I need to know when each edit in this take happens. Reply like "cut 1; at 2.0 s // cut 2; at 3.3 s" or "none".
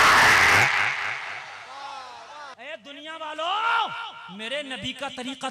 cut 1; at 2.5 s